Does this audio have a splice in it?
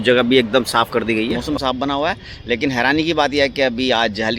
yes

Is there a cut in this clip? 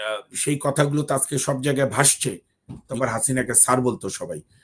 yes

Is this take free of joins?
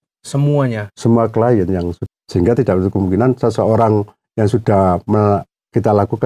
no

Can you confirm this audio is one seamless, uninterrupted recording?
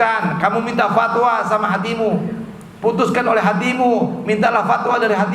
yes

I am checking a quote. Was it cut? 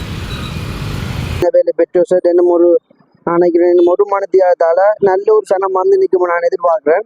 yes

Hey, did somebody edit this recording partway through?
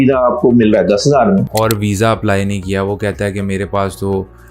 yes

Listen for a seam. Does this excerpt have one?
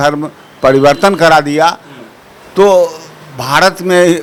no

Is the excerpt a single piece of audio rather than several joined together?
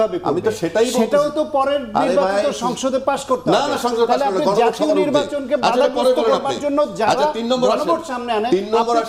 yes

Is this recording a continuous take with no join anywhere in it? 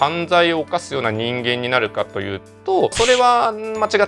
no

